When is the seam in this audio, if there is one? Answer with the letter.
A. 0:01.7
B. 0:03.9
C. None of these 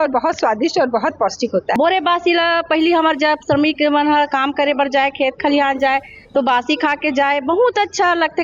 A